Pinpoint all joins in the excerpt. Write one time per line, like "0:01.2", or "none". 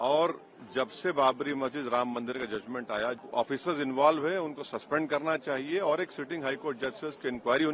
0:03.2